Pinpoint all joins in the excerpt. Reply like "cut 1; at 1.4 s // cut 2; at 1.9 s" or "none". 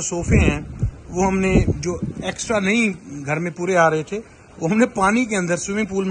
none